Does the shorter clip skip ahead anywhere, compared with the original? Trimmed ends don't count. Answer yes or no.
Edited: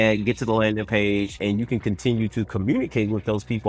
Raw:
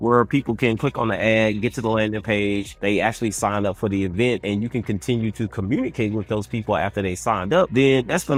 yes